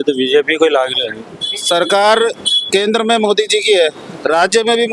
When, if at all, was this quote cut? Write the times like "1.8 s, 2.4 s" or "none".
1.3 s